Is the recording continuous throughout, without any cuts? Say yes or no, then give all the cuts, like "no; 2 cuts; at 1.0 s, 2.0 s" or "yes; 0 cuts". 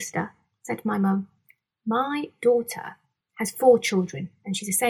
yes; 0 cuts